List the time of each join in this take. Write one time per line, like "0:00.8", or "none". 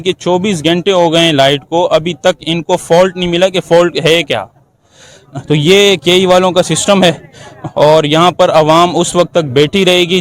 none